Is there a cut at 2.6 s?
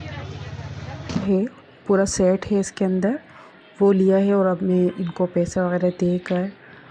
no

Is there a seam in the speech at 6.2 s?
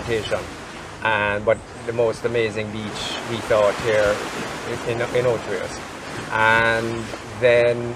no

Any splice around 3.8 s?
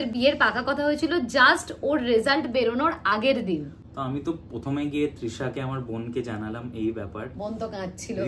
no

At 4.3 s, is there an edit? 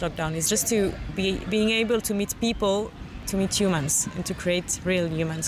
no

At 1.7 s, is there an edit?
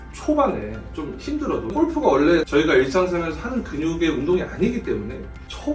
no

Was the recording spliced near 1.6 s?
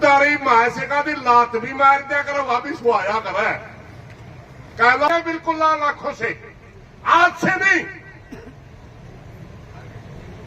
no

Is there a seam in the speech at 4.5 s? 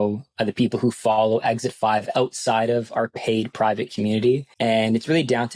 yes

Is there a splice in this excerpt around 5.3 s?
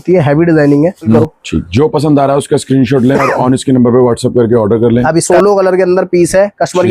yes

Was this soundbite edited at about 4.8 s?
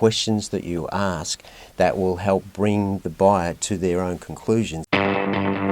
yes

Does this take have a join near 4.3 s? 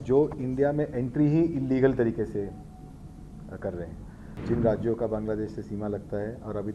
yes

